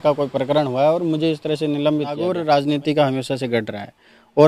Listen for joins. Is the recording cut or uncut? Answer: cut